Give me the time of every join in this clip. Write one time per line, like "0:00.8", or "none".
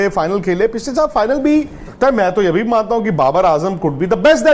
0:01.9